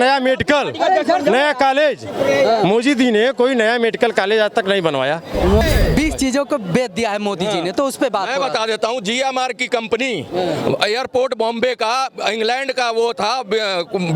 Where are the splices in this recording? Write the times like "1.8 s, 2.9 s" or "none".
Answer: 5.6 s